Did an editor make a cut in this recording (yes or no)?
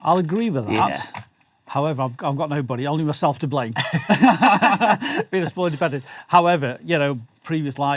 no